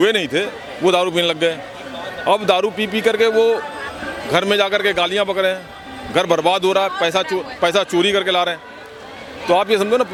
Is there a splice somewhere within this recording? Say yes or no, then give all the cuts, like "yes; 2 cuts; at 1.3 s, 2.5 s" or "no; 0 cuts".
no; 0 cuts